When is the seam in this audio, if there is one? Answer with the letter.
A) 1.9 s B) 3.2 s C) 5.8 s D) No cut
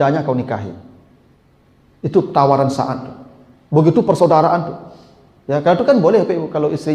D